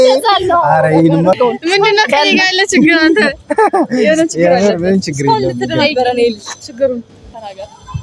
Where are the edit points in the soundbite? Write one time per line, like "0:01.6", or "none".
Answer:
0:01.4